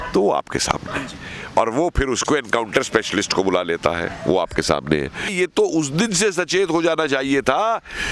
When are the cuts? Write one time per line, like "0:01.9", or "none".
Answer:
0:05.3